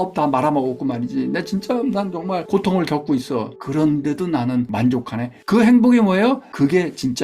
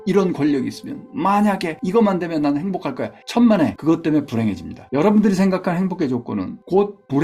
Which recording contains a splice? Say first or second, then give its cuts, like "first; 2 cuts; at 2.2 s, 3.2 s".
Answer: first; 1 cut; at 4.7 s